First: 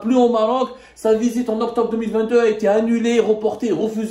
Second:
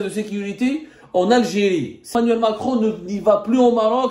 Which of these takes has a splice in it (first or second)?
second